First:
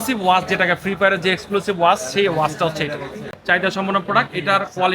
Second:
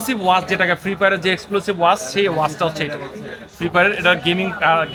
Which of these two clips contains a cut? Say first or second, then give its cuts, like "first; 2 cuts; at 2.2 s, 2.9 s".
first; 1 cut; at 3.3 s